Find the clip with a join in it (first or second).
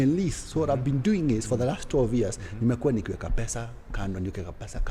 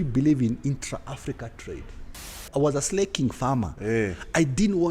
second